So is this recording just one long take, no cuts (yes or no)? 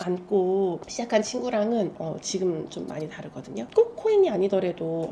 no